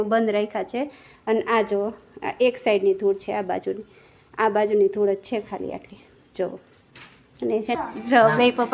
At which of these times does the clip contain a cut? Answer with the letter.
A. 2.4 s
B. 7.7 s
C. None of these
B